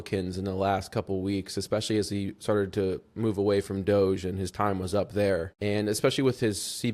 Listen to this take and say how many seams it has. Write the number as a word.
one